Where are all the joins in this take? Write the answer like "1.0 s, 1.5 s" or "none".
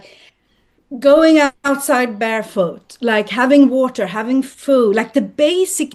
none